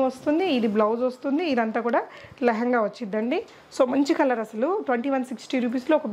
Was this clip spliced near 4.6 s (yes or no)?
no